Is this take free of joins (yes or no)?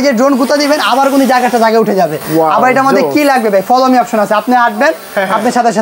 yes